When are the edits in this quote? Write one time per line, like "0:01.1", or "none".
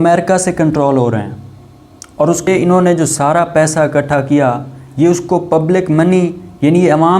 0:02.5